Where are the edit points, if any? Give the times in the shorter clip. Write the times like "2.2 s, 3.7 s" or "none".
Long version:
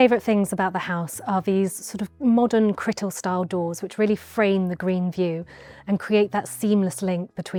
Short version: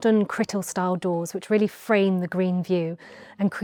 none